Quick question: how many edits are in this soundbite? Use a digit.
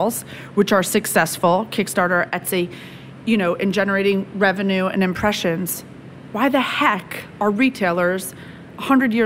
0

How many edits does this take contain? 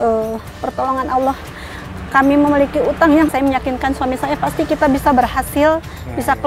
1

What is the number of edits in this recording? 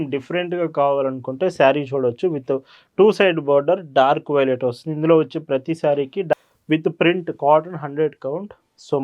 1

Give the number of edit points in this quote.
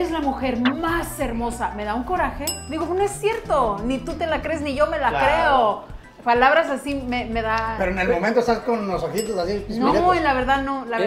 0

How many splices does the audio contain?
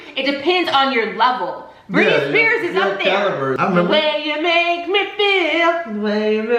1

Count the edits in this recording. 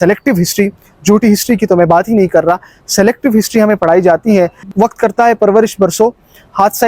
1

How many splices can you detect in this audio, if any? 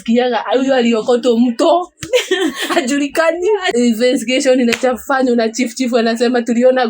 1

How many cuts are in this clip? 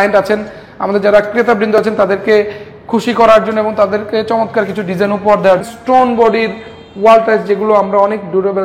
1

